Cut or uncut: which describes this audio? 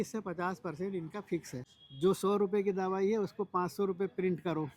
cut